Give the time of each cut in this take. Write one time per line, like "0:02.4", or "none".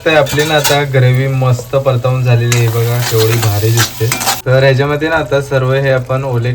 0:04.4